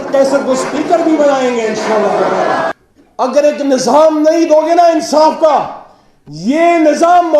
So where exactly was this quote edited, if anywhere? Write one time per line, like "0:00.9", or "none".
0:02.7